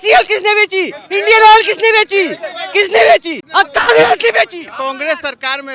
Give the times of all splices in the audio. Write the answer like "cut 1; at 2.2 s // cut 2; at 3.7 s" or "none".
cut 1; at 3.4 s // cut 2; at 4.7 s